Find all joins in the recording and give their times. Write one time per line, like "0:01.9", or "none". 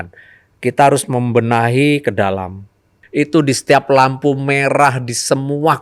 0:02.9